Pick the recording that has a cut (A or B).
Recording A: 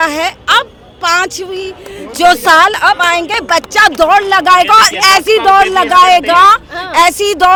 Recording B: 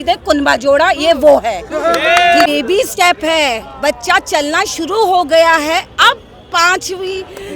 B